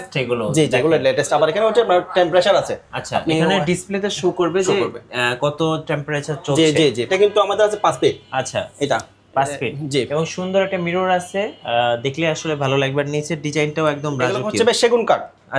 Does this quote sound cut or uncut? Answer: cut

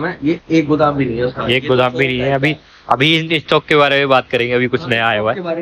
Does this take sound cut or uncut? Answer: uncut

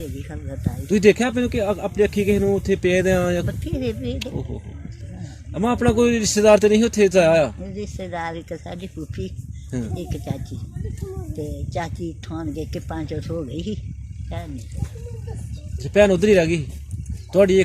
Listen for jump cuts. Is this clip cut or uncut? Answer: uncut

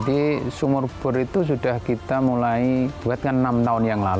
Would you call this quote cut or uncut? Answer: cut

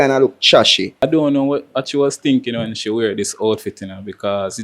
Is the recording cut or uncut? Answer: cut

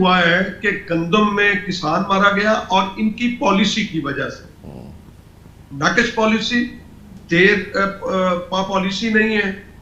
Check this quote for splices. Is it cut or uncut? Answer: uncut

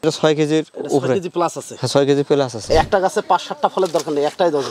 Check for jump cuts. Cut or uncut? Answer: cut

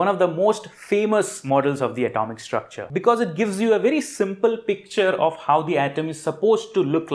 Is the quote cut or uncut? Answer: cut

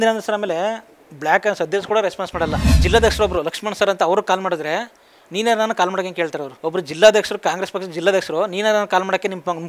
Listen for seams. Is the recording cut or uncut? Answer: cut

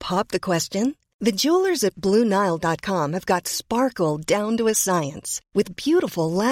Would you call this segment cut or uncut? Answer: uncut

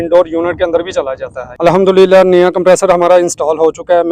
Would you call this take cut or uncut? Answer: cut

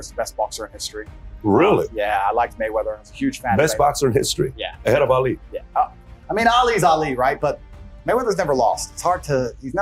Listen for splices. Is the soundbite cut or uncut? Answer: uncut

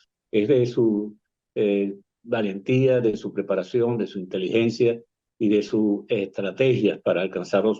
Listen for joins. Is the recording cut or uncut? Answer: uncut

